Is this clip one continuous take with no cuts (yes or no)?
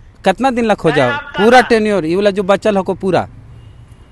yes